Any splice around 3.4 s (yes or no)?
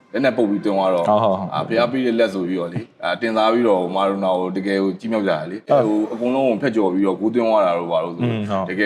no